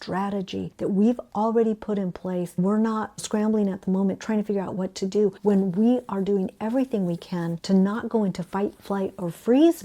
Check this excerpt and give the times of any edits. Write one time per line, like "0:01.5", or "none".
0:02.6
0:05.4
0:07.6